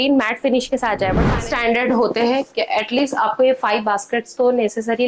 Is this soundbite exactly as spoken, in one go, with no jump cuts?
no; 1 cut; at 1.3 s

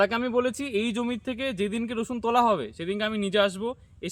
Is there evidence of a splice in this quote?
no; 0 cuts

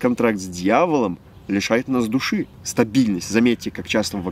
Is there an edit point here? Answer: yes; 1 cut; at 2.6 s

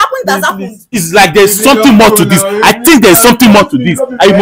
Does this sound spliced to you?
yes; 1 cut; at 0.9 s

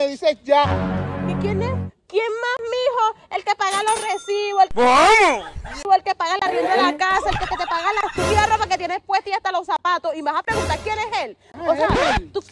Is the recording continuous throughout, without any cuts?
yes; 0 cuts

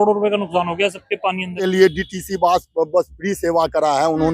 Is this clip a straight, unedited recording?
no; 1 cut; at 1.6 s

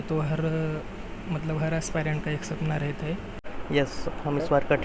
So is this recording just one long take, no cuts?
no; 1 cut; at 3.5 s

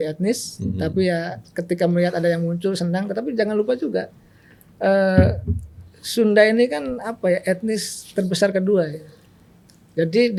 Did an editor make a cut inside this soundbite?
no; 0 cuts

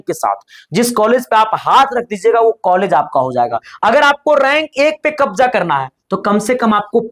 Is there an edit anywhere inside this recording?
yes; 1 cut; at 3.7 s

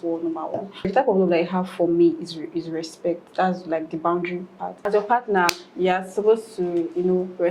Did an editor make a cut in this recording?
yes; 2 cuts; at 0.9 s, 4.9 s

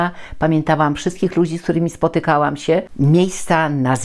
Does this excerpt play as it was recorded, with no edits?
no; 1 cut; at 2.9 s

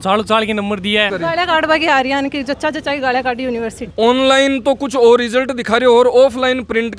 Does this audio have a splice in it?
yes; 2 cuts; at 1.1 s, 3.9 s

